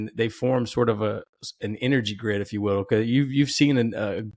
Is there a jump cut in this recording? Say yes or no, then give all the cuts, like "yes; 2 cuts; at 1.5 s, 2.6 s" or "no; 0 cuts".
no; 0 cuts